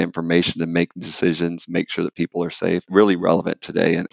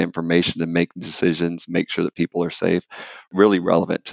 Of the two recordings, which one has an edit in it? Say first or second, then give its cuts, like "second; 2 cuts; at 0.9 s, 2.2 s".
first; 1 cut; at 2.9 s